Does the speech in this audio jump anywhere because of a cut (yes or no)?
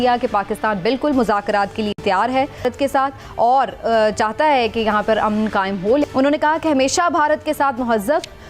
no